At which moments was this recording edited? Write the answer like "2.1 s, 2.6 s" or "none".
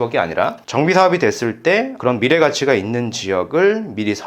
none